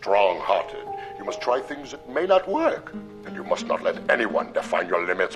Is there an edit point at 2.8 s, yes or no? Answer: no